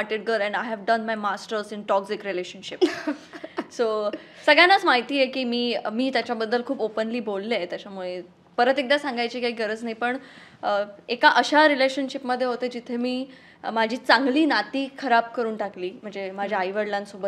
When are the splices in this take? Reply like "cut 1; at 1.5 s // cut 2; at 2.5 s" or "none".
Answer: none